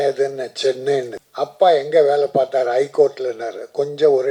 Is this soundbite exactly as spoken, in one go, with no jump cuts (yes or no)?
no